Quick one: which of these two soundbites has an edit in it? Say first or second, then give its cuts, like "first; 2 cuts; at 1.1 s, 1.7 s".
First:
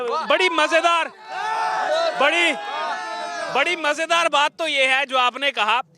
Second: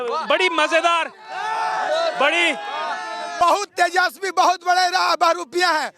second; 1 cut; at 3.4 s